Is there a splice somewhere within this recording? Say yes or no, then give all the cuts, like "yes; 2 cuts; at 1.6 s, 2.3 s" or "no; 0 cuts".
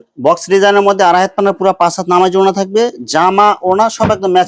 no; 0 cuts